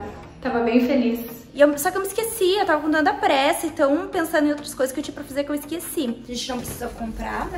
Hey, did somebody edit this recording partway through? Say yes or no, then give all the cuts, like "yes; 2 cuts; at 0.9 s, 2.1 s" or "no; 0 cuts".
yes; 2 cuts; at 1.5 s, 6.3 s